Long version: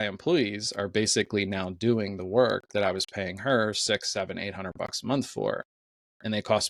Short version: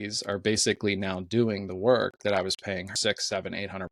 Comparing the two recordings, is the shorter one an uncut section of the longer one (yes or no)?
no